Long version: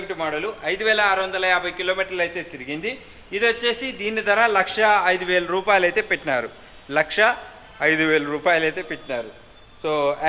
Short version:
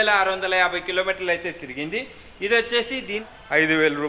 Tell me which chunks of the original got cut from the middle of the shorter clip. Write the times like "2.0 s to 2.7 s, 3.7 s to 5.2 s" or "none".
4.1 s to 7.5 s